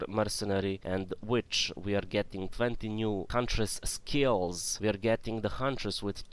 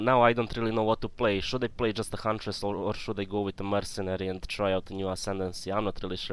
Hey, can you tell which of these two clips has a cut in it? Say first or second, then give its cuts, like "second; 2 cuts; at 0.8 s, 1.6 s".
first; 3 cuts; at 0.8 s, 3.3 s, 4.6 s